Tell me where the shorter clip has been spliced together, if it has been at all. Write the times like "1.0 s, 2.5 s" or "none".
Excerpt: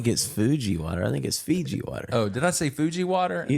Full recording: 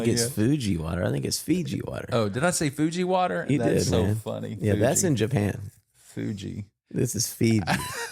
none